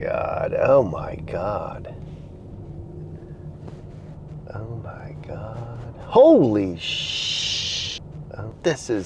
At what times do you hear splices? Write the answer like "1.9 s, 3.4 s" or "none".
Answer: 8.0 s